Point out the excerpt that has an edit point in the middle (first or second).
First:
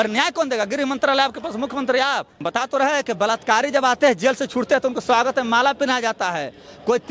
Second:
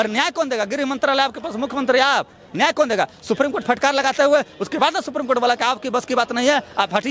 first